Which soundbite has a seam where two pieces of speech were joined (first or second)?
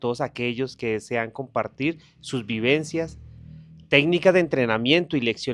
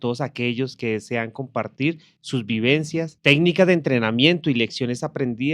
second